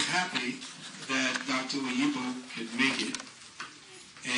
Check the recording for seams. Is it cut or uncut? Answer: uncut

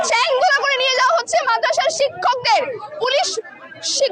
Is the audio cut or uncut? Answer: uncut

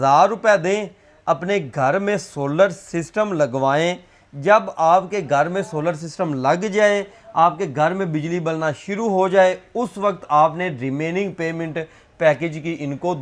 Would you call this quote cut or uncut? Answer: uncut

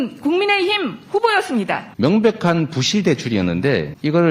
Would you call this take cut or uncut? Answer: cut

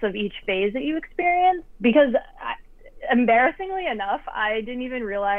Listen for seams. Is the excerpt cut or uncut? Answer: cut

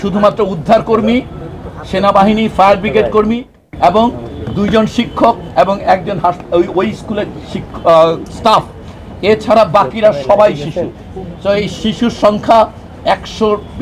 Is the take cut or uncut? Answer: uncut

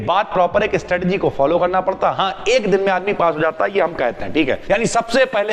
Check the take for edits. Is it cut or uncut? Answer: cut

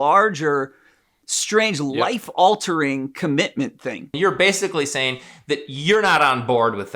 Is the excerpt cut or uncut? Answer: cut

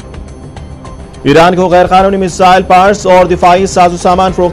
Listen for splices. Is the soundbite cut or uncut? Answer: cut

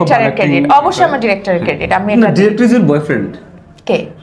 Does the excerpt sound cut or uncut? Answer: uncut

